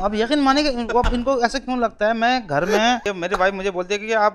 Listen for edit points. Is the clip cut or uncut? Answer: cut